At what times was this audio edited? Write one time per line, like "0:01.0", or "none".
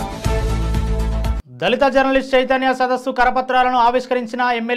0:01.4